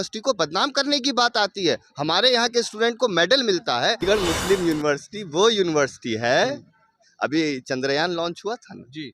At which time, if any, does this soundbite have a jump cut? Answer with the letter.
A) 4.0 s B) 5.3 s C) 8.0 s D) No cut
A